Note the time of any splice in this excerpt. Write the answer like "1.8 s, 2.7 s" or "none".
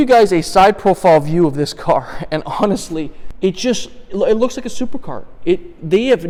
none